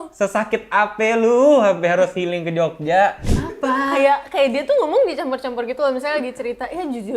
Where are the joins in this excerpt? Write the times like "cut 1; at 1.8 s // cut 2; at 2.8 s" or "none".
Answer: cut 1; at 3.3 s